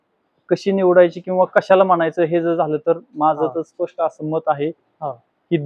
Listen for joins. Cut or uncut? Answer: uncut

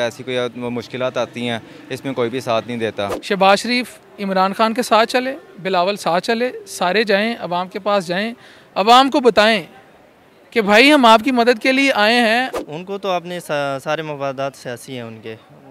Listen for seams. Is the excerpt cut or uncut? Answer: cut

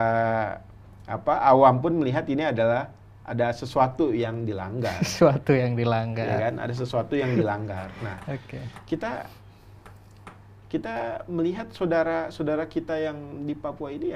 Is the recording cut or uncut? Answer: uncut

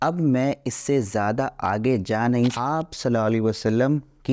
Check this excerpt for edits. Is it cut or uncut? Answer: cut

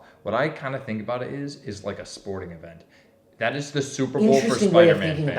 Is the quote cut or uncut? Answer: uncut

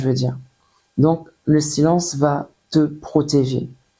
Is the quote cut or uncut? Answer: uncut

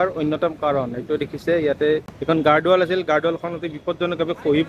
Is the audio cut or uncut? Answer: cut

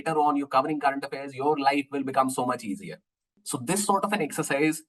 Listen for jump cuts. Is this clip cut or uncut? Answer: cut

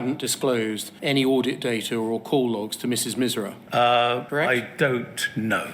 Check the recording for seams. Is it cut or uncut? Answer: cut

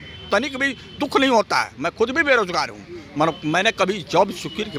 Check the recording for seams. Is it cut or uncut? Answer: uncut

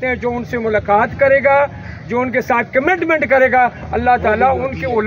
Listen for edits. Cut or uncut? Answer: uncut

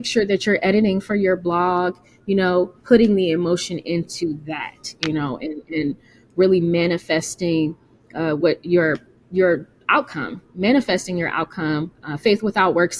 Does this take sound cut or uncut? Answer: uncut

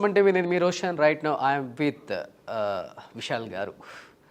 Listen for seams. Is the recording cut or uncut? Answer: uncut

